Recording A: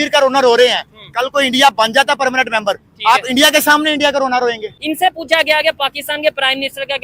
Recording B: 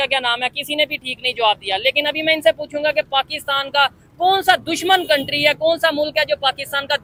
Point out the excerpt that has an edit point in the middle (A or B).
A